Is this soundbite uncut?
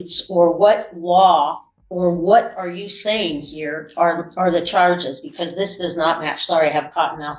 yes; 0 cuts

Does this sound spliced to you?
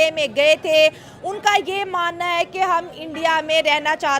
no; 0 cuts

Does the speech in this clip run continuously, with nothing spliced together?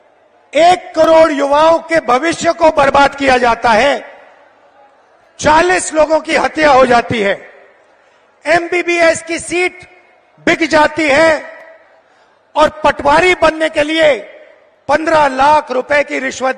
yes; 0 cuts

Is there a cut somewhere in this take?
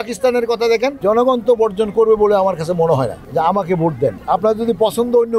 yes; 3 cuts; at 1.0 s, 3.2 s, 4.2 s

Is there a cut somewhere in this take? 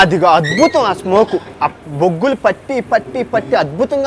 no; 0 cuts

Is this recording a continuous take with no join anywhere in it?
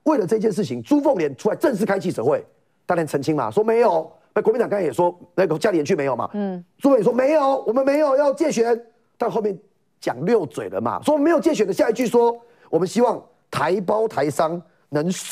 yes; 0 cuts

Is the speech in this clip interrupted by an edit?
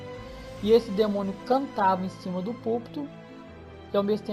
yes; 1 cut; at 3.1 s

